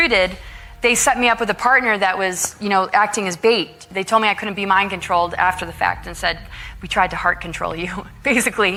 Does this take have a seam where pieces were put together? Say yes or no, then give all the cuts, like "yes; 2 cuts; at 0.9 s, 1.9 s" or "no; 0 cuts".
no; 0 cuts